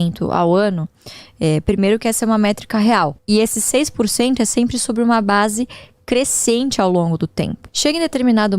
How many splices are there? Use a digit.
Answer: 2